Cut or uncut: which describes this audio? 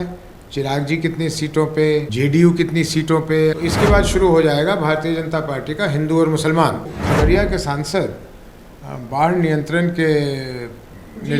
cut